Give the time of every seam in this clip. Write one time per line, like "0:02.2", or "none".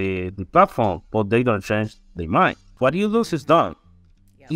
0:02.7